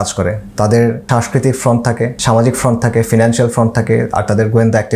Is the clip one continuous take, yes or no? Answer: no